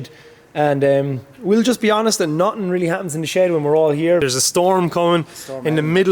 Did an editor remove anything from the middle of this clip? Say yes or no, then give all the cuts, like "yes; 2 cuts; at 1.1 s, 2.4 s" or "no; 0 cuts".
yes; 1 cut; at 4.2 s